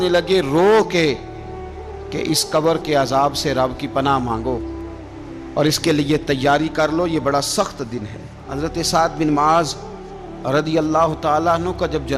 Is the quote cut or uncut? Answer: cut